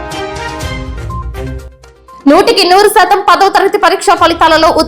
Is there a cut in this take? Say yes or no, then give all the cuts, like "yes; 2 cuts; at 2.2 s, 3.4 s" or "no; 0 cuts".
yes; 1 cut; at 1.5 s